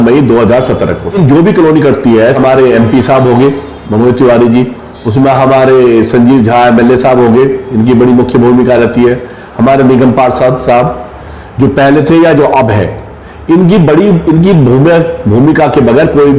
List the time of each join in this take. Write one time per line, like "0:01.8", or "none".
0:01.1
0:02.4

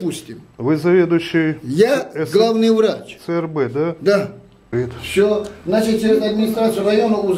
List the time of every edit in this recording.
0:04.6

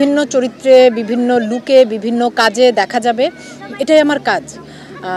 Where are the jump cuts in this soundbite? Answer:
none

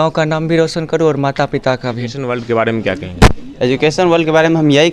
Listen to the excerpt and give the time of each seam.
0:02.3

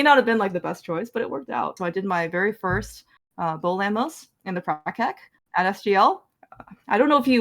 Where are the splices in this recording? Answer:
0:01.7
0:06.3

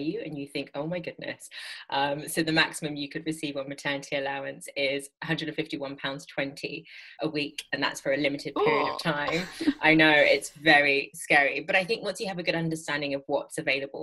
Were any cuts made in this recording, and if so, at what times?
0:05.1
0:07.1

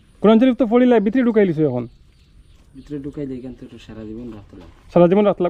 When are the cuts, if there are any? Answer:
none

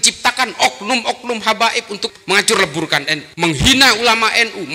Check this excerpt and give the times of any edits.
0:02.1
0:03.2

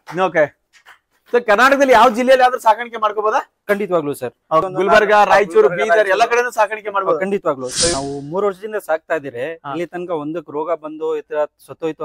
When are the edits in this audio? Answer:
0:04.7
0:07.9

